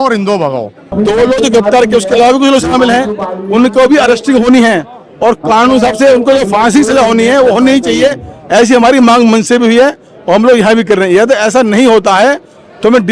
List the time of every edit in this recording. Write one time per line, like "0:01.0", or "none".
0:00.9